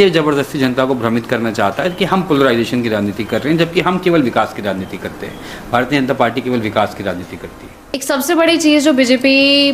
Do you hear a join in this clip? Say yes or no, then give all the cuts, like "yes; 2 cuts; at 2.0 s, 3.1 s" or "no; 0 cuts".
yes; 1 cut; at 8.0 s